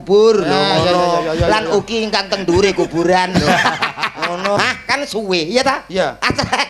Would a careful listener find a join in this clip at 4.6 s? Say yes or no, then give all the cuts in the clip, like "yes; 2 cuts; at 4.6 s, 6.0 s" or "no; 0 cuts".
yes; 1 cut; at 4.6 s